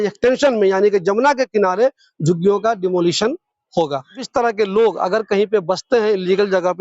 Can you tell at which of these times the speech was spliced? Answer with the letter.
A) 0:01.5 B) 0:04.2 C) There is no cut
B